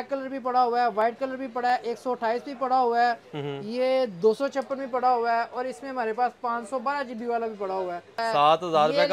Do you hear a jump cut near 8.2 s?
yes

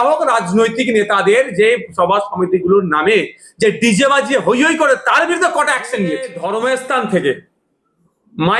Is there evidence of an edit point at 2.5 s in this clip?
no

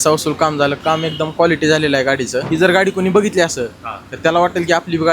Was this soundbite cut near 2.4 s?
yes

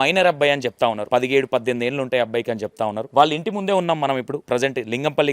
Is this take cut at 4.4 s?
yes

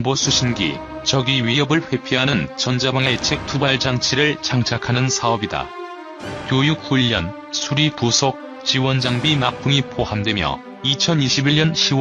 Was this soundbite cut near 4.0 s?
no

